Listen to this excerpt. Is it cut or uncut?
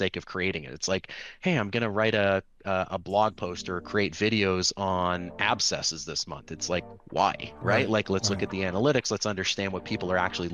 uncut